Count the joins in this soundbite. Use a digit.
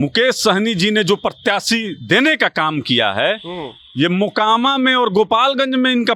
0